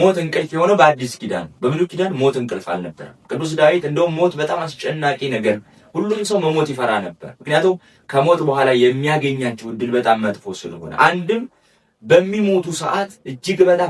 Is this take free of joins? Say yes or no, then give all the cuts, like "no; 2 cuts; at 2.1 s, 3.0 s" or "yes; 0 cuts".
yes; 0 cuts